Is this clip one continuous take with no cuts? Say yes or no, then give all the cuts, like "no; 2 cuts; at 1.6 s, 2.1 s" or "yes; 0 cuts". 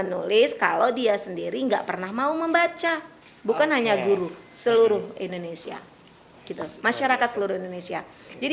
yes; 0 cuts